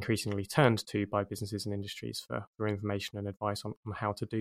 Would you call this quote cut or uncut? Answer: uncut